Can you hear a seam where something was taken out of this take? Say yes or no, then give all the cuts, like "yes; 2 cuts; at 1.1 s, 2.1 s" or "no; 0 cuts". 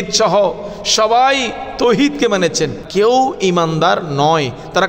yes; 1 cut; at 2.8 s